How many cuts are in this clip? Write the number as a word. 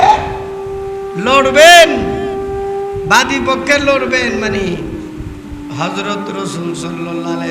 two